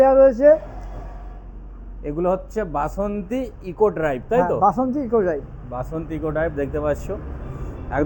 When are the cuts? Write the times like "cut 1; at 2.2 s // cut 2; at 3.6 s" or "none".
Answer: none